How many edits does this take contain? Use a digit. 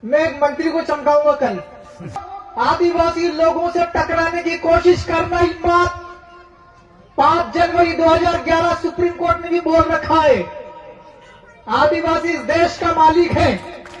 1